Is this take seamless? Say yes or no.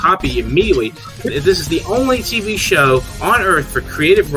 yes